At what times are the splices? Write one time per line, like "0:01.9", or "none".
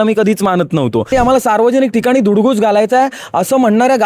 0:01.1